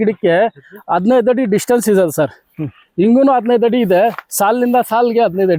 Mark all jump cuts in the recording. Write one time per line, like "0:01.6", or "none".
none